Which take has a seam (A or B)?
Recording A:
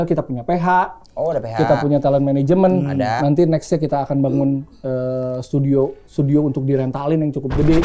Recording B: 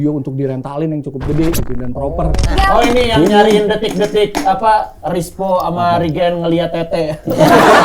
B